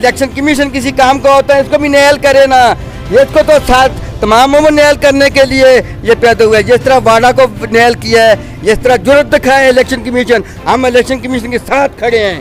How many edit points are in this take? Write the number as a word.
zero